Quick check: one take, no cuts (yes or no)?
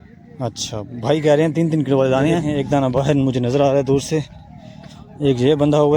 no